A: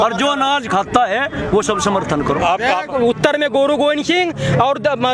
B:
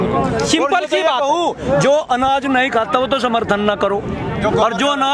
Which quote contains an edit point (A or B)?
A